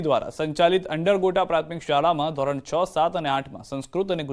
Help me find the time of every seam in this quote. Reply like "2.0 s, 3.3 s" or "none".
none